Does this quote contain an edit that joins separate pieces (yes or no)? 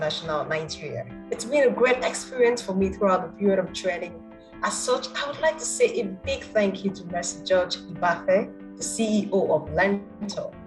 yes